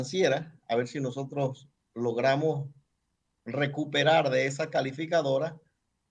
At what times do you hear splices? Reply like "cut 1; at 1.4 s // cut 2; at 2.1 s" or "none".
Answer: none

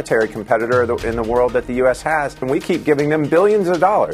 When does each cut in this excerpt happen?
cut 1; at 2.4 s

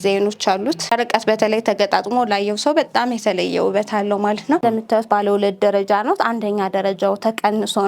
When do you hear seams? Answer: cut 1; at 0.9 s // cut 2; at 4.6 s

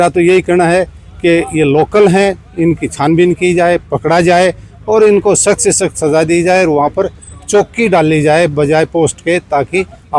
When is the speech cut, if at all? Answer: none

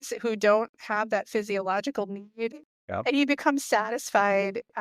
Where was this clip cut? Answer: cut 1; at 2.6 s

